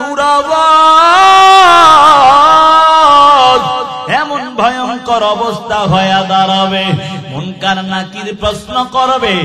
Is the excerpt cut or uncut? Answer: cut